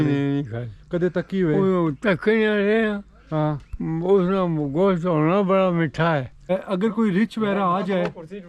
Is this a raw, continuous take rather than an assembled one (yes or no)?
no